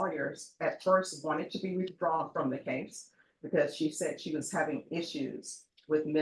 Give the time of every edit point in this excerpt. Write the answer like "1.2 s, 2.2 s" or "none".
none